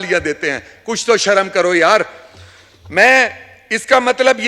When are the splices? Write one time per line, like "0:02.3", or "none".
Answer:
none